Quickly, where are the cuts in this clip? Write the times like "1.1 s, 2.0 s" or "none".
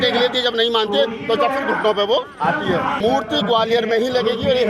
3.0 s